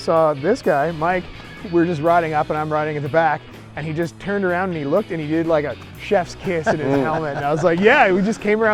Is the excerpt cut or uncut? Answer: uncut